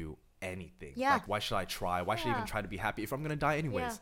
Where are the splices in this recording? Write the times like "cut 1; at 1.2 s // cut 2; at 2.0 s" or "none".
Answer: cut 1; at 1.2 s